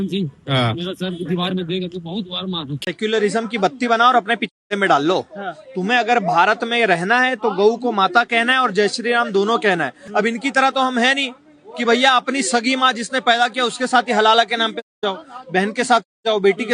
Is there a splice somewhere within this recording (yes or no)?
yes